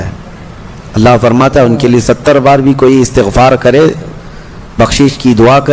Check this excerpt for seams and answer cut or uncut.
uncut